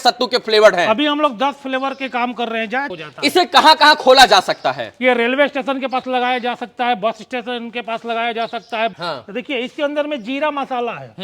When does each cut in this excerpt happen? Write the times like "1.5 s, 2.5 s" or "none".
2.9 s, 9.0 s